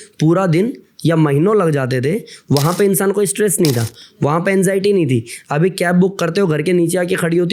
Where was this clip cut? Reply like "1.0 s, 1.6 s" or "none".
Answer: none